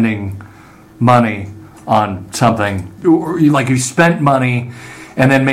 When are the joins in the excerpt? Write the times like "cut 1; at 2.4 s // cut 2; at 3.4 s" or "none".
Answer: cut 1; at 2.9 s